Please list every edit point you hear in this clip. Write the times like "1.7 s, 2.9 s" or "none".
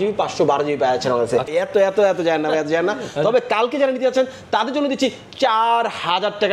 1.5 s